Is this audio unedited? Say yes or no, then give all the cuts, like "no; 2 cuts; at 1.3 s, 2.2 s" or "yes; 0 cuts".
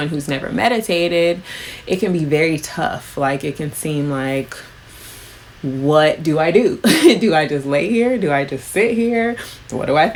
yes; 0 cuts